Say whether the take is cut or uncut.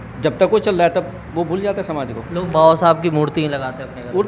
uncut